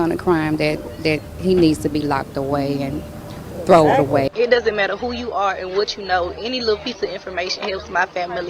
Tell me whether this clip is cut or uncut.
cut